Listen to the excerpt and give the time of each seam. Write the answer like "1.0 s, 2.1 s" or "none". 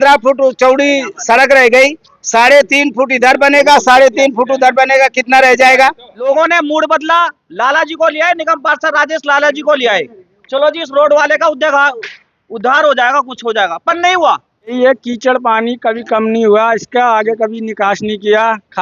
6.1 s, 14.8 s